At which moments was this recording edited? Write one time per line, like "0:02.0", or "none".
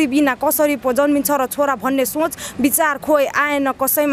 none

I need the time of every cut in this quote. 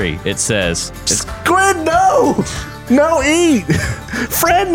0:00.9
0:02.8

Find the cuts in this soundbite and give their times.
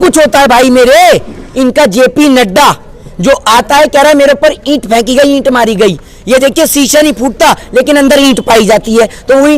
0:01.5

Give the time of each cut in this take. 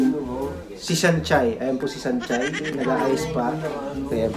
none

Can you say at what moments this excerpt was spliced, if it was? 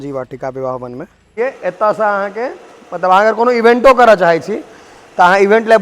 0:01.3

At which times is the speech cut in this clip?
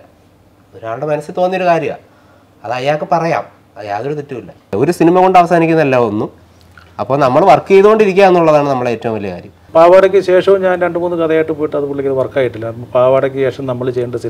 0:04.7
0:09.5

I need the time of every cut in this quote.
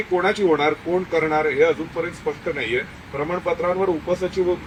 none

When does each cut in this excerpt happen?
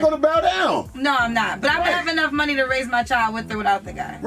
none

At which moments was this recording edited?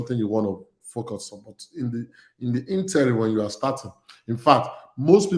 none

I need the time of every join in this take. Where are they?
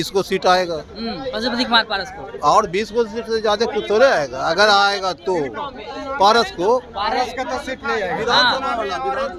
none

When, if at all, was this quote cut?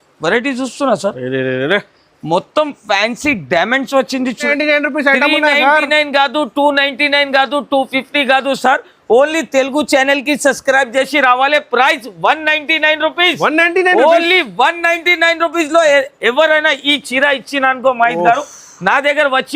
0:04.4

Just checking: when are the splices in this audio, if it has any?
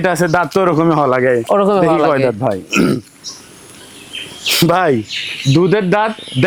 none

